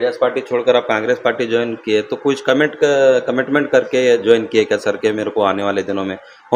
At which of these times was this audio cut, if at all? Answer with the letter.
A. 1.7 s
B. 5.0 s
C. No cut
C